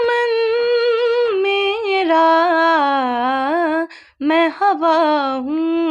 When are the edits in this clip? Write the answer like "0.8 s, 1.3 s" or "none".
none